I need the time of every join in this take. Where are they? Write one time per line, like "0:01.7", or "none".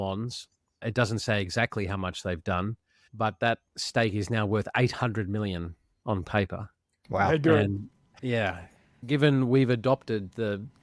none